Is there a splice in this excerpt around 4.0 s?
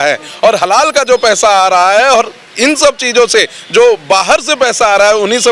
no; 0 cuts

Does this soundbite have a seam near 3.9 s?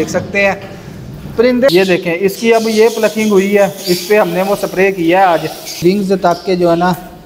no; 2 cuts; at 1.7 s, 5.8 s

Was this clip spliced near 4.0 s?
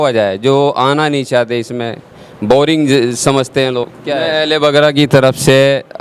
yes; 1 cut; at 4.0 s

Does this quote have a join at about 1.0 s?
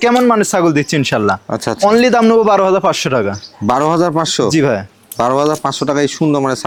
no; 0 cuts

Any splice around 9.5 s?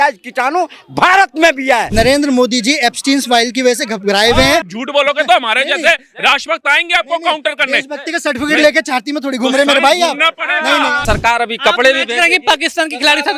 no; 3 cuts; at 1.9 s, 4.7 s, 11.0 s

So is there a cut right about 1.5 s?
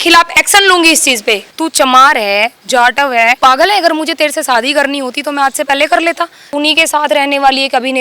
yes; 3 cuts; at 1.5 s, 3.4 s, 6.4 s

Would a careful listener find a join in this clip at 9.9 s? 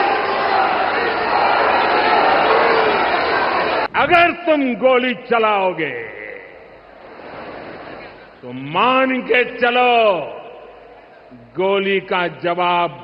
no; 1 cut; at 3.9 s

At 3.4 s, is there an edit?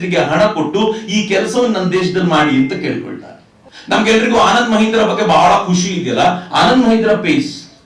no; 0 cuts

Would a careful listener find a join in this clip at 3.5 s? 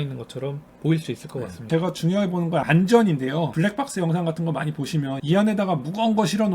yes; 4 cuts; at 1.7 s, 2.7 s, 3.5 s, 5.2 s

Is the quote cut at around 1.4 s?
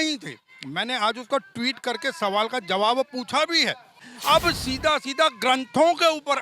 no; 1 cut; at 4.1 s

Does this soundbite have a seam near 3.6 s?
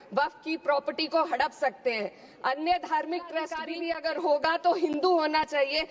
yes; 1 cut; at 3.6 s

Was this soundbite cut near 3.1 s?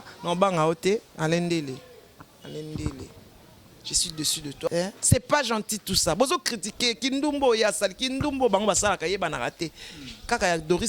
no; 1 cut; at 4.7 s

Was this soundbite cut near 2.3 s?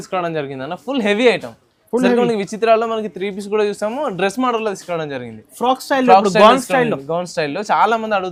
no; 0 cuts

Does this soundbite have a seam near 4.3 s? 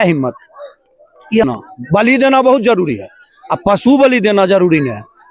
no; 1 cut; at 1.4 s

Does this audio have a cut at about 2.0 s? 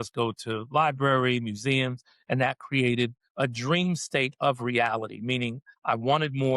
no; 2 cuts; at 3.2 s, 5.7 s

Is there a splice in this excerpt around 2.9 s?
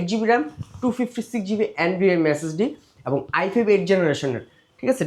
no; 0 cuts

